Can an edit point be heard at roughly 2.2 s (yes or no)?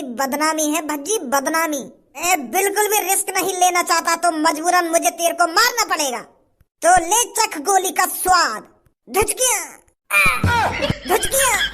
yes